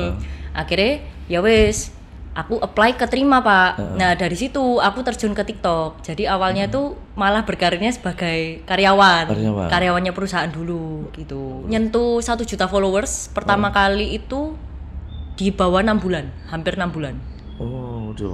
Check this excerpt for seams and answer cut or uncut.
cut